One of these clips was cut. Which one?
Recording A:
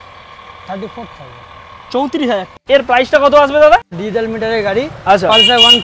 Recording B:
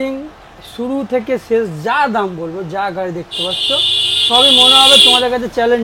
A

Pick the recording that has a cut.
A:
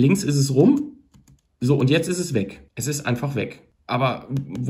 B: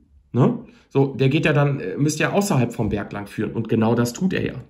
A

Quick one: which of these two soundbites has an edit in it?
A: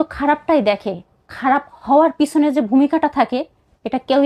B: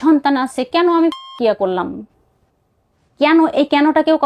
B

